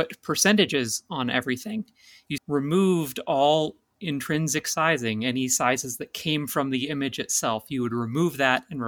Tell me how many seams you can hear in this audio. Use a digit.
1